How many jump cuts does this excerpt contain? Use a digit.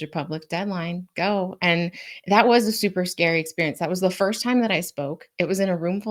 0